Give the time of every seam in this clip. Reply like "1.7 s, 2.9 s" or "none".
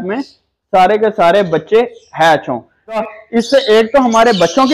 3.0 s